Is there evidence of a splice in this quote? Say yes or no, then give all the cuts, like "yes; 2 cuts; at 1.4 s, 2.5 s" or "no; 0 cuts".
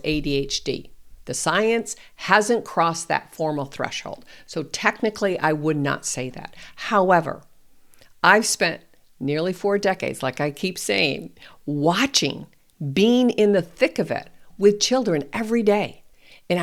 no; 0 cuts